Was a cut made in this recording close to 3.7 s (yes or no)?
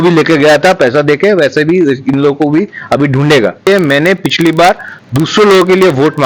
yes